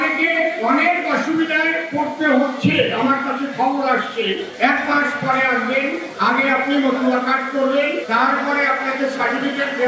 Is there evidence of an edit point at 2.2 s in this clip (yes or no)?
no